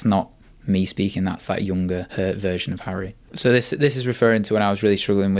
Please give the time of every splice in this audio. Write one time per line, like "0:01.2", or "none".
0:02.1
0:03.2